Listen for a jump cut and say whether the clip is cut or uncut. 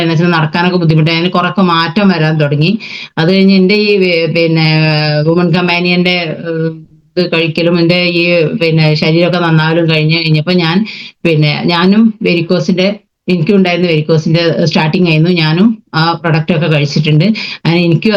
uncut